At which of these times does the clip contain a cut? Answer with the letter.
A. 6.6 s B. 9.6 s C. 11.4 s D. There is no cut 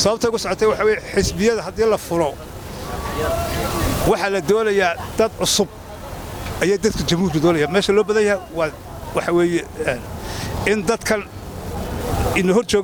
D